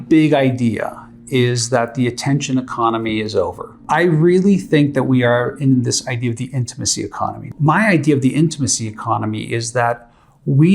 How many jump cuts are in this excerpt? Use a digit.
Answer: 2